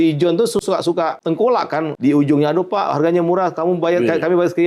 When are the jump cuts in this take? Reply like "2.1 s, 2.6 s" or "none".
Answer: 1.2 s, 1.9 s